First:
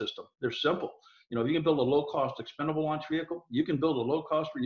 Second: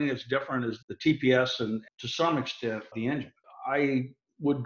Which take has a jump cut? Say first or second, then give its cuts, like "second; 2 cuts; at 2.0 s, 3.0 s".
second; 3 cuts; at 0.8 s, 1.9 s, 2.9 s